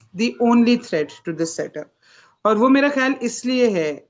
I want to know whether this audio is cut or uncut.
uncut